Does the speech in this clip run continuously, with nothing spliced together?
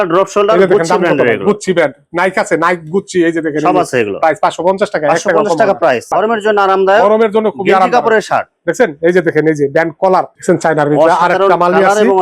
no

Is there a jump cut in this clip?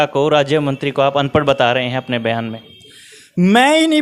no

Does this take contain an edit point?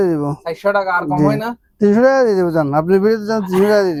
no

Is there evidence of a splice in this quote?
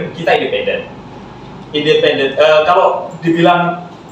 no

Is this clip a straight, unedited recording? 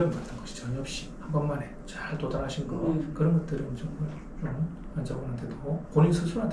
yes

